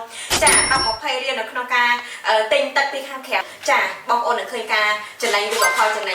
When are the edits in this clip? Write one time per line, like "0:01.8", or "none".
0:03.4

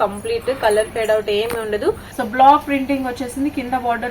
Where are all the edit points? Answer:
0:02.1

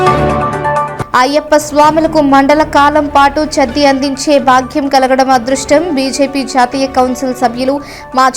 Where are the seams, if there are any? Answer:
0:00.9

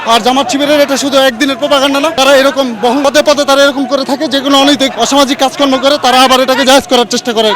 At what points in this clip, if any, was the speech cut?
0:02.1
0:03.0
0:04.9

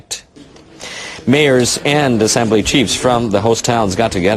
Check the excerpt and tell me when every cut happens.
0:03.3

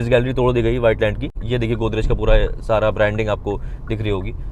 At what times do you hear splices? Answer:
0:01.4

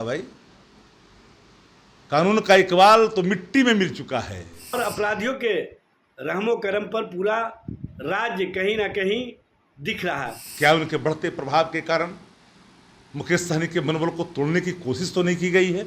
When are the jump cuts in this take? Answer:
0:04.7
0:10.4

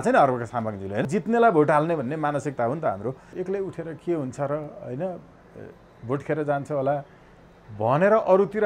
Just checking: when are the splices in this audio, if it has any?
0:01.0
0:03.3

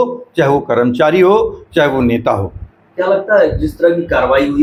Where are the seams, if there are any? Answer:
none

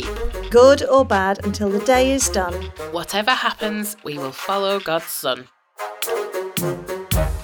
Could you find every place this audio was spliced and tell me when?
0:05.9

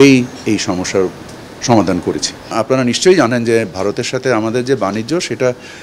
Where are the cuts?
0:02.5

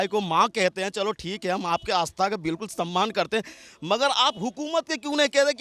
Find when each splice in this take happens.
none

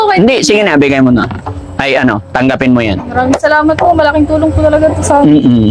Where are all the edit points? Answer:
none

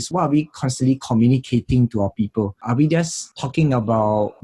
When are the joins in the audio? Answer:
none

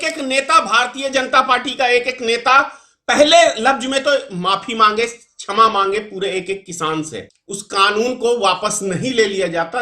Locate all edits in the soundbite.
0:07.2

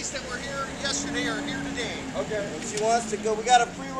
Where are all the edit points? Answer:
none

